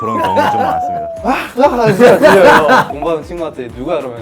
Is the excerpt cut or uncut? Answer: cut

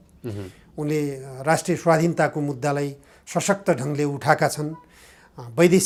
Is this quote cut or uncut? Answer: uncut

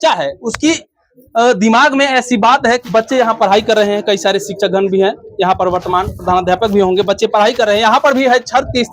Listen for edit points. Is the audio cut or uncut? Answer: cut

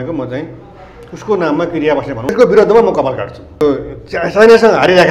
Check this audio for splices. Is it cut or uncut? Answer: cut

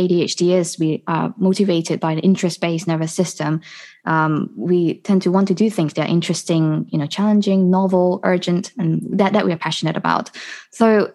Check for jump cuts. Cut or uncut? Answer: uncut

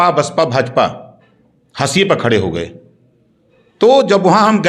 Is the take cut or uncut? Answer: uncut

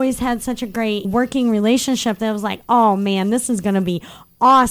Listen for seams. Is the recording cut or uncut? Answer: cut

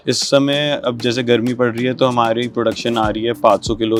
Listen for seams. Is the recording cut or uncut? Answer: uncut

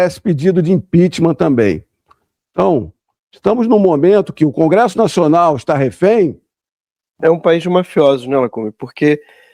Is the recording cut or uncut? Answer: cut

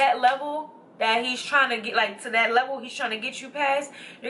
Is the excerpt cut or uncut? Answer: uncut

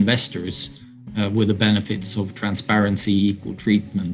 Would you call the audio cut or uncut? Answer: uncut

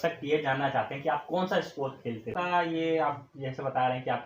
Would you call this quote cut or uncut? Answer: cut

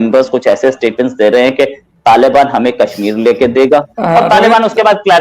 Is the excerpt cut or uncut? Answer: cut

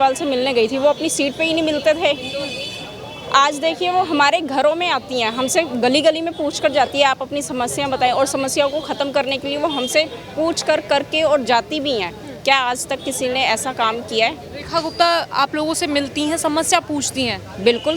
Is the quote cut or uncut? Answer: uncut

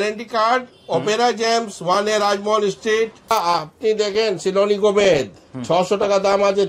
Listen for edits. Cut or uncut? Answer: cut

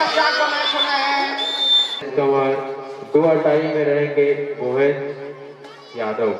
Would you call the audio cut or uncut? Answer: cut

